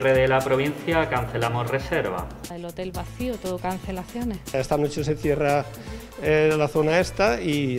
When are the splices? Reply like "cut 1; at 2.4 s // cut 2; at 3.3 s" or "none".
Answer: cut 1; at 2.6 s // cut 2; at 4.5 s